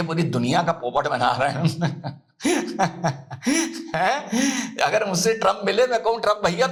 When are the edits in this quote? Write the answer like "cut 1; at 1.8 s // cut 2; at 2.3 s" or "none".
none